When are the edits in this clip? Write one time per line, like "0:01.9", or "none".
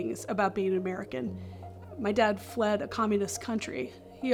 none